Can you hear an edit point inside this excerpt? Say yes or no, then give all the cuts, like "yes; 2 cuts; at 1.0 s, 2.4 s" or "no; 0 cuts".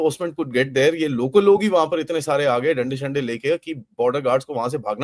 no; 0 cuts